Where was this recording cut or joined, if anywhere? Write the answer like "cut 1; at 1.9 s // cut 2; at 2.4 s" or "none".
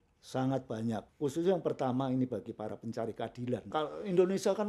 cut 1; at 1.1 s // cut 2; at 3.7 s